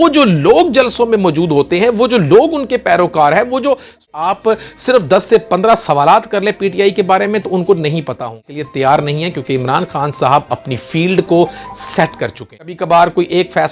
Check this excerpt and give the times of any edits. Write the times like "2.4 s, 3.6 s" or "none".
4.4 s, 8.4 s, 12.8 s